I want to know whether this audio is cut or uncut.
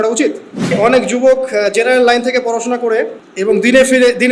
cut